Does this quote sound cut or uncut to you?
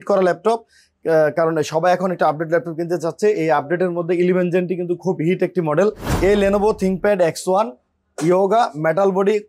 cut